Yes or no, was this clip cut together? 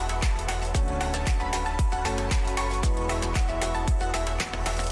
no